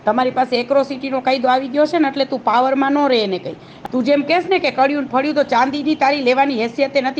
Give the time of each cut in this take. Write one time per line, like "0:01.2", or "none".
0:03.7

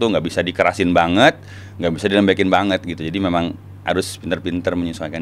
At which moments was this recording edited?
none

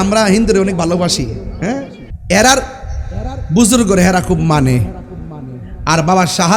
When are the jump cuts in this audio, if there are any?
0:02.0

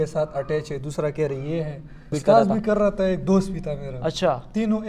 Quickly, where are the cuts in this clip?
0:02.1

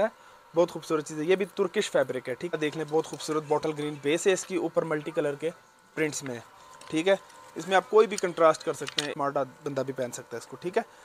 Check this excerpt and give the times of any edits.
0:02.5
0:09.1

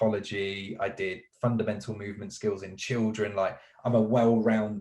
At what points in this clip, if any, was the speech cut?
none

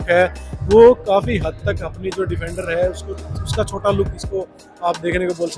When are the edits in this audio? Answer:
none

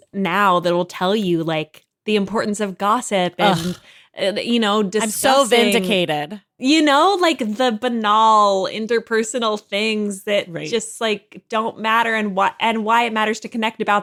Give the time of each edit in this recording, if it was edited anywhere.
none

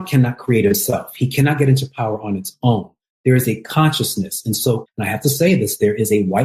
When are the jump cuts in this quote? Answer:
0:04.9

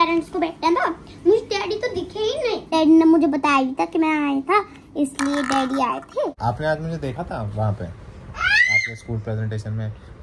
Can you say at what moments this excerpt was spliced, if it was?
0:02.7
0:06.4

